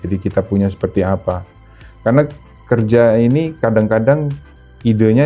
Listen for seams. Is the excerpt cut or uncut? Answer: uncut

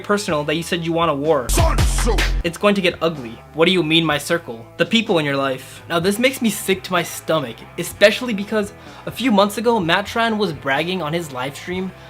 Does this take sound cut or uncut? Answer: uncut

